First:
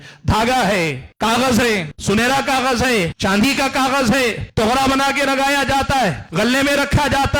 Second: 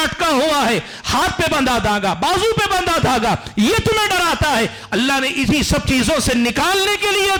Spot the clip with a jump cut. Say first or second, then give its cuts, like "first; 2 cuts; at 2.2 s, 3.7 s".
first; 5 cuts; at 1.0 s, 1.9 s, 3.1 s, 4.4 s, 6.2 s